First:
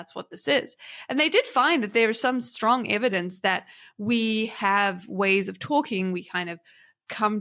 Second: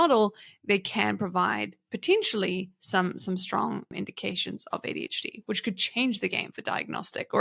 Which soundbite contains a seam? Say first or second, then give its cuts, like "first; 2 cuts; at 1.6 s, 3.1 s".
second; 1 cut; at 3.9 s